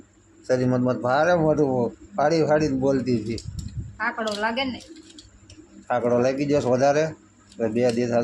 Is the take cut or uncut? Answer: uncut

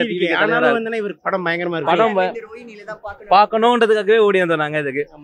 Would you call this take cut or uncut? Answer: uncut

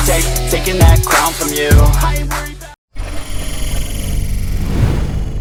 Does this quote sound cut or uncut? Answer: uncut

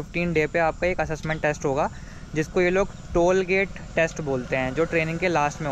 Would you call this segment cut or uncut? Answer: uncut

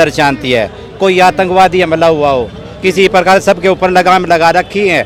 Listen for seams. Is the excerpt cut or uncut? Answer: uncut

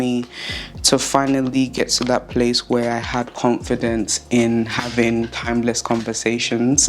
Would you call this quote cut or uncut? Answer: uncut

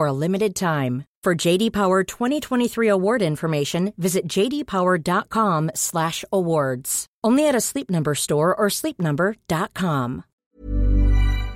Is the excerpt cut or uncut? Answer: cut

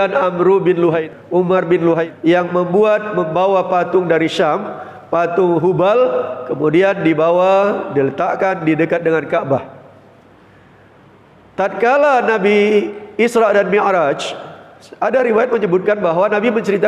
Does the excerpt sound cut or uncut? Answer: cut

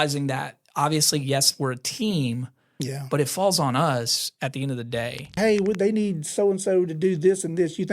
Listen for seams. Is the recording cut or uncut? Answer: cut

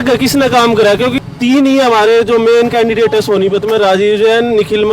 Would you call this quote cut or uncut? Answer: uncut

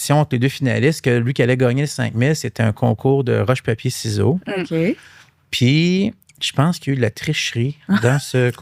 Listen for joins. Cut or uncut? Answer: uncut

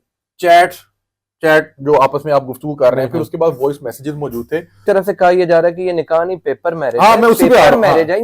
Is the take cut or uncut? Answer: cut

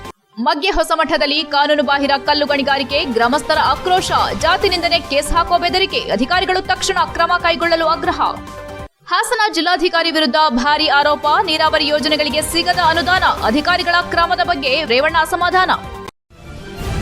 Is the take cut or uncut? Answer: cut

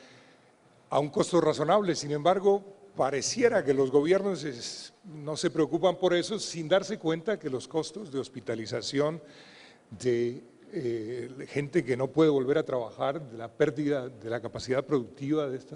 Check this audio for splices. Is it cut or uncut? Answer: uncut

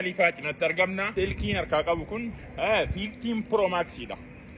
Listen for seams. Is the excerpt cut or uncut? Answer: cut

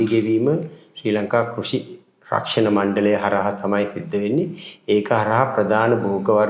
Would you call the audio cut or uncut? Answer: uncut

